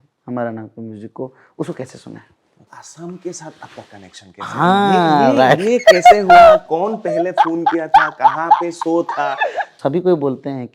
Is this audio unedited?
no; 2 cuts; at 2.8 s, 9.7 s

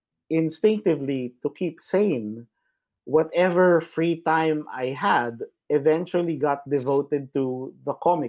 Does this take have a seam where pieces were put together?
no; 0 cuts

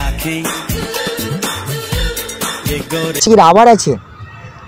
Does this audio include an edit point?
yes; 1 cut; at 3.2 s

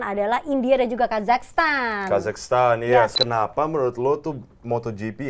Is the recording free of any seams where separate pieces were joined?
no; 1 cut; at 3.2 s

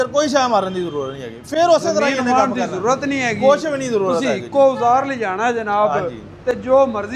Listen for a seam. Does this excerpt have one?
no; 0 cuts

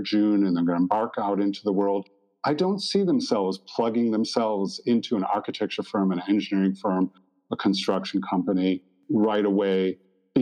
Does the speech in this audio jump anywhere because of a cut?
no; 0 cuts

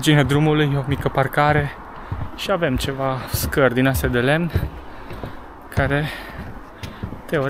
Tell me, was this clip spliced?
no; 0 cuts

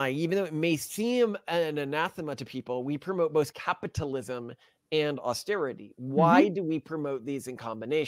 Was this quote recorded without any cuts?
yes; 0 cuts

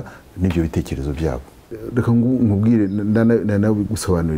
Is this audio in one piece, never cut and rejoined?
no; 1 cut; at 1.8 s

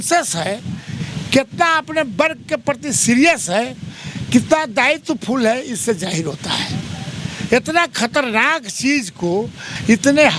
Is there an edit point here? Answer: no; 0 cuts

